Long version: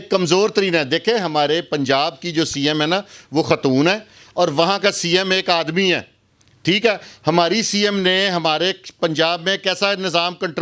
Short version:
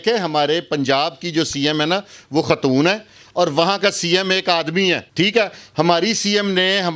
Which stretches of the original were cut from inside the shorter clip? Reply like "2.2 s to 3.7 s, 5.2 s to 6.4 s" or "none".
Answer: 6.1 s to 6.5 s